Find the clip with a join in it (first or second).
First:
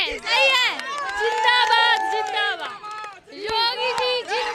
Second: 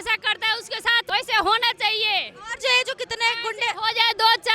second